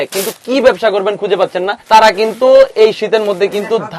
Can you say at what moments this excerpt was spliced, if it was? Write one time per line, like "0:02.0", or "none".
0:01.8